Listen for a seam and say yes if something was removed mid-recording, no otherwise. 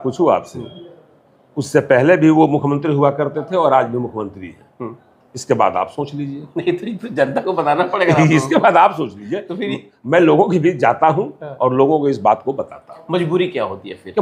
no